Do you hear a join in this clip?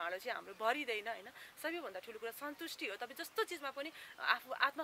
no; 0 cuts

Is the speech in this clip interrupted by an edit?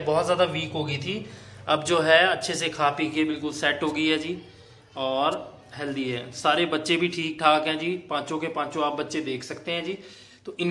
no; 0 cuts

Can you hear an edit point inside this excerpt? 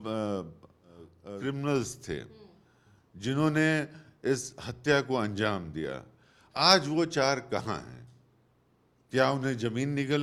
no; 0 cuts

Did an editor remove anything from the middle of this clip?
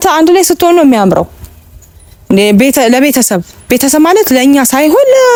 no; 0 cuts

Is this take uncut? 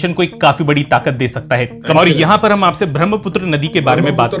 no; 1 cut; at 1.8 s

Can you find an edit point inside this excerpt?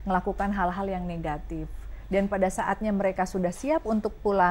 no; 0 cuts

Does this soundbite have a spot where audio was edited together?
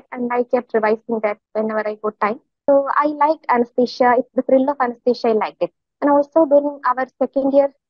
yes; 1 cut; at 2.5 s

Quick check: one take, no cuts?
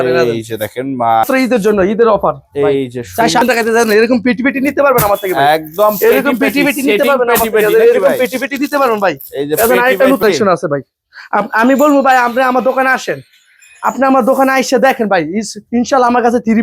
no; 3 cuts; at 1.3 s, 3.4 s, 10.2 s

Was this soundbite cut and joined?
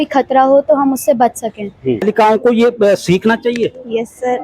yes; 1 cut; at 2.0 s

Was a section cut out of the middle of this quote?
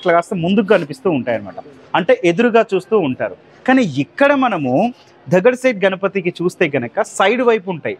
no; 0 cuts

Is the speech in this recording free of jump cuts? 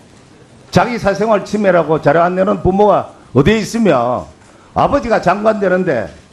no; 1 cut; at 2.8 s

